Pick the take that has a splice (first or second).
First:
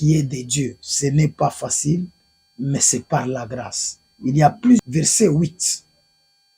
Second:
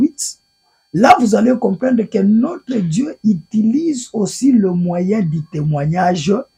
first